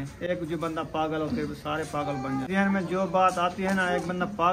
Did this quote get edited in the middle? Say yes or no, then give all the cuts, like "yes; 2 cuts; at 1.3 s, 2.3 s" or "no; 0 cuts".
yes; 1 cut; at 2.5 s